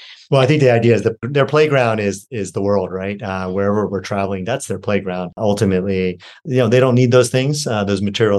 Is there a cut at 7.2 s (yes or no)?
no